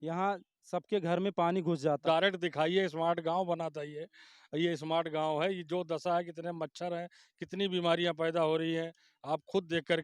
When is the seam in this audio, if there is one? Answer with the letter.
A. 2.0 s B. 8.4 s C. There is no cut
A